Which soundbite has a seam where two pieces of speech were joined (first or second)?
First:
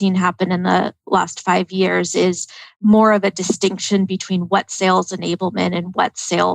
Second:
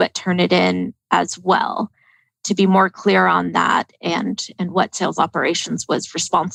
first